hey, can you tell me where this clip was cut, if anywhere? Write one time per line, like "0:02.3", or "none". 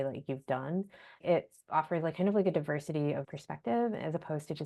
0:01.2
0:03.3